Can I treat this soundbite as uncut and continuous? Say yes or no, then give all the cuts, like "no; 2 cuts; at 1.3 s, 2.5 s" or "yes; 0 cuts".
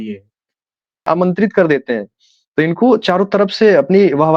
no; 1 cut; at 1.1 s